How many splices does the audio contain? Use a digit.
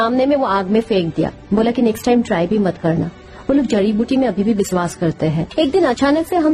1